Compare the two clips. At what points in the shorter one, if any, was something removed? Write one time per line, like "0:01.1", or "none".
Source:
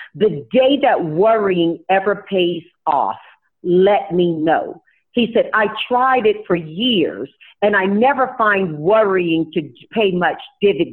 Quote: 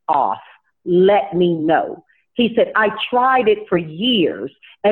none